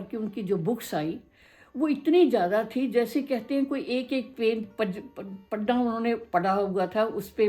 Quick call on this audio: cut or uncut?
uncut